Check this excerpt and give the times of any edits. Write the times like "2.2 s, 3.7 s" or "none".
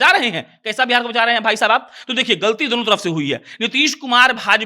none

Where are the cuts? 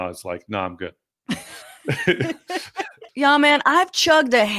1.1 s, 3.0 s

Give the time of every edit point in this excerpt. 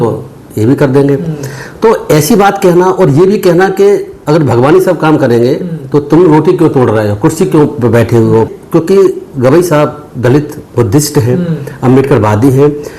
8.6 s

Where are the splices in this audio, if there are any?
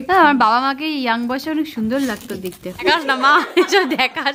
2.8 s

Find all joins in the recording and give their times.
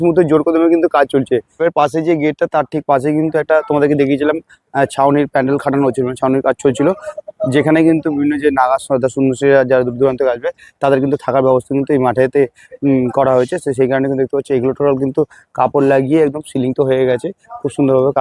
none

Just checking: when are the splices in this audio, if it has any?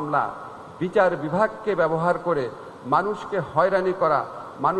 none

